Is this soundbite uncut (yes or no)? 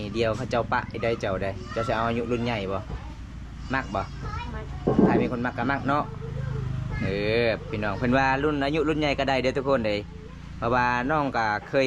yes